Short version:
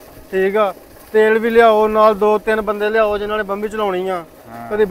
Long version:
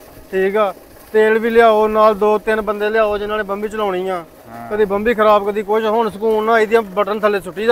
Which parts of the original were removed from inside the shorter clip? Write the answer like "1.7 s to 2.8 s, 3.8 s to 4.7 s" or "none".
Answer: none

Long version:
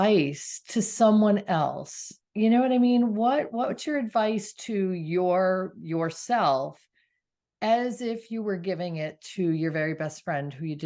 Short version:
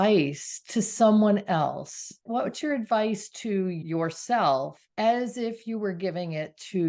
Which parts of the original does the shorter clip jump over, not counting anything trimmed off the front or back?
2.3 s to 3.5 s, 5.0 s to 5.8 s, 6.8 s to 7.4 s

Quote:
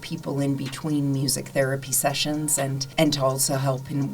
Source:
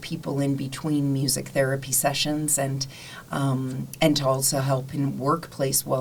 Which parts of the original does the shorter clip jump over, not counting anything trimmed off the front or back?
2.8 s to 3.9 s

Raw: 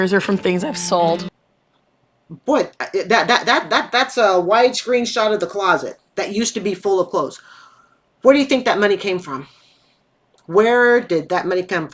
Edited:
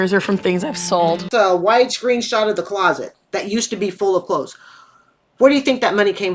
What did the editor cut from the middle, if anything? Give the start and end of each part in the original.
1.3 s to 4.1 s

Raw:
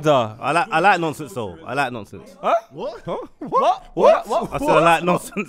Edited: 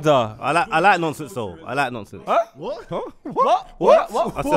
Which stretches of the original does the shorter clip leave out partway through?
2.1 s to 2.2 s

